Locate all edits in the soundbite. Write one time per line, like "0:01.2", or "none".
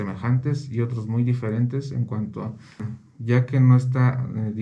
0:03.0